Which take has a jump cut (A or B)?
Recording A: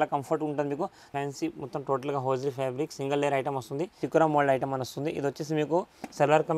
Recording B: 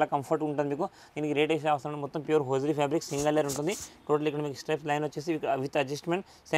A